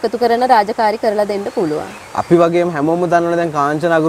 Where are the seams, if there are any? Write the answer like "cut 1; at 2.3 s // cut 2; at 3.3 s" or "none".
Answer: cut 1; at 1.9 s

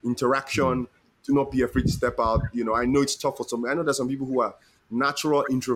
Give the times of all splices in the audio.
none

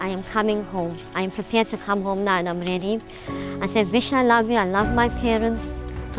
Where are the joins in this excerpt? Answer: none

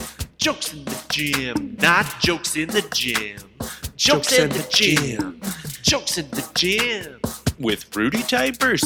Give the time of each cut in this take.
none

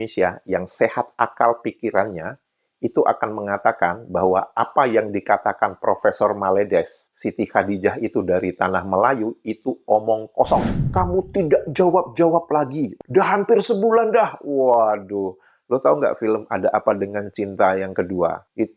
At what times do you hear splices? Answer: cut 1; at 10.8 s // cut 2; at 13.0 s

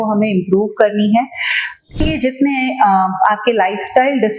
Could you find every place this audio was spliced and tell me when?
cut 1; at 2.0 s

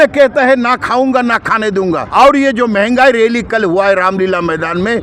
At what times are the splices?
cut 1; at 2.0 s

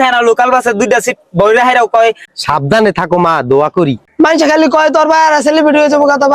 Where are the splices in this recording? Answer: cut 1; at 2.3 s // cut 2; at 4.0 s

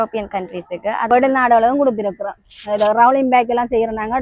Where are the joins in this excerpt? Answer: cut 1; at 1.1 s

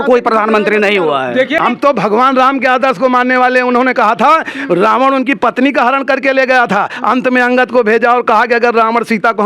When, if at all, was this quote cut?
cut 1; at 1.6 s

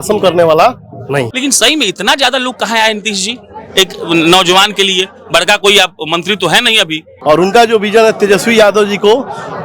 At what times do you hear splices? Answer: cut 1; at 1.3 s // cut 2; at 7.1 s

